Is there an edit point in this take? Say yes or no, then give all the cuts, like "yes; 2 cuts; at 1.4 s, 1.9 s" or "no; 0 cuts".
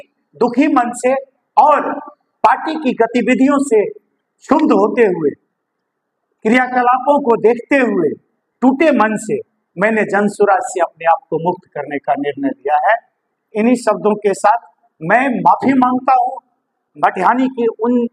no; 0 cuts